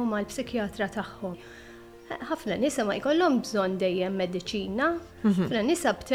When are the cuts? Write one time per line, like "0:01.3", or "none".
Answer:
0:01.4